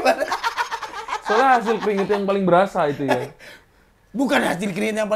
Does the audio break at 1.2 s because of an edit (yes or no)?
no